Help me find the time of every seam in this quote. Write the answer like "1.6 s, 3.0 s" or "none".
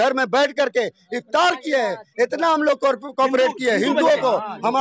none